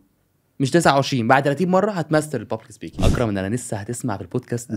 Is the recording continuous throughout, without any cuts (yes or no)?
no